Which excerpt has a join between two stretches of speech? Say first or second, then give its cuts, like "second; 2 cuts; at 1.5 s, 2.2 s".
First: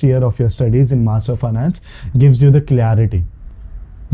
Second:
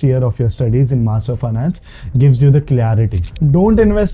second; 1 cut; at 3.2 s